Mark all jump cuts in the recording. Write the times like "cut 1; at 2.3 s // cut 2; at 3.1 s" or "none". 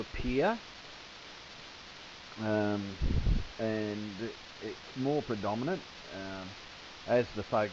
cut 1; at 4.5 s